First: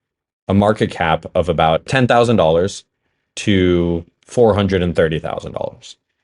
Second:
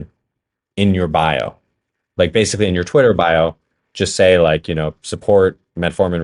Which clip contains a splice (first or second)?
first